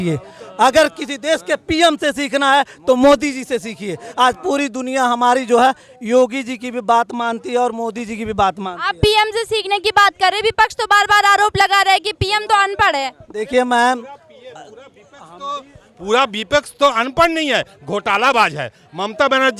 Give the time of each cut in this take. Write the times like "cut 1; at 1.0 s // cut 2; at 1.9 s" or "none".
none